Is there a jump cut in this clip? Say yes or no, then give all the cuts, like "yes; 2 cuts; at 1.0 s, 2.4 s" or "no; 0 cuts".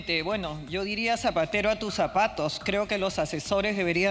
no; 0 cuts